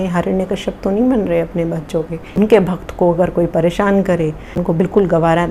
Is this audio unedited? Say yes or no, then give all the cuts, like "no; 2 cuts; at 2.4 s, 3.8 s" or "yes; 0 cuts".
no; 2 cuts; at 2.5 s, 4.6 s